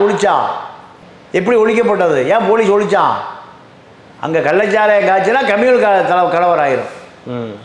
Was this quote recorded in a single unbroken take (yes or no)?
yes